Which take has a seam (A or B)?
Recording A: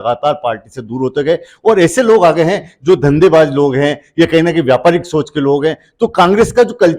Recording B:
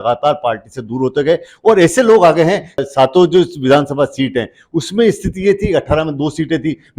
B